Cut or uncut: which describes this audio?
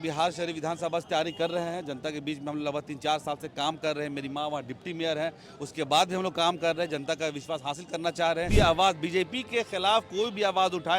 cut